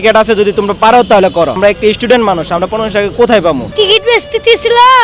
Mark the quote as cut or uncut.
cut